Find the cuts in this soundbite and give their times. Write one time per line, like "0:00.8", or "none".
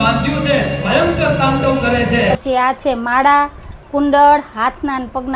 0:02.4

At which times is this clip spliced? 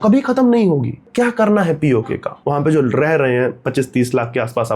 0:01.1
0:02.3

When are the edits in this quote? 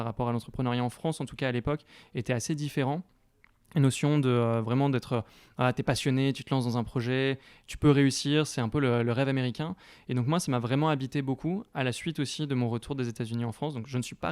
none

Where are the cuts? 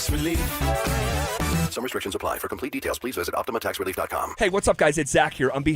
0:04.3

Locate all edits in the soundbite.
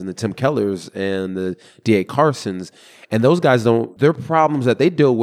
0:03.9

